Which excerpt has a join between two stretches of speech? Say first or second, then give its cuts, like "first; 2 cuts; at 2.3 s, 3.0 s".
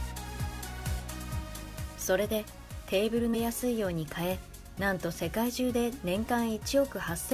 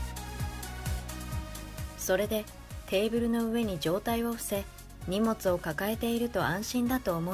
second; 1 cut; at 3.3 s